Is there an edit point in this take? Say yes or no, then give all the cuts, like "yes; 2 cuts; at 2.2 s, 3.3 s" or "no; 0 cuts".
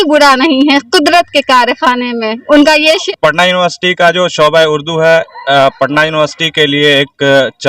yes; 1 cut; at 3.0 s